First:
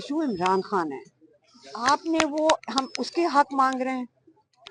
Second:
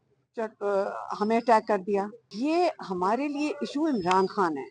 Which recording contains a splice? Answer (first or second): second